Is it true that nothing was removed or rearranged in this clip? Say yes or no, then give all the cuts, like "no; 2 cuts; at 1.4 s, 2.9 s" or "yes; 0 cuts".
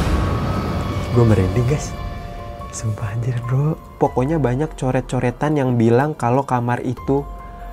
no; 1 cut; at 3.9 s